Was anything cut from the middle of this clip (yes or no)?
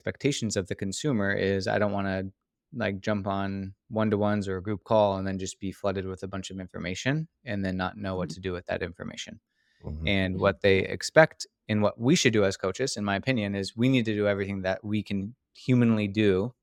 no